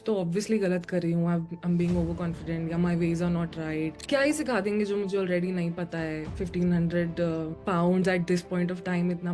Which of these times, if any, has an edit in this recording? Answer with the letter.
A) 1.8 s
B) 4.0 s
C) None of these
B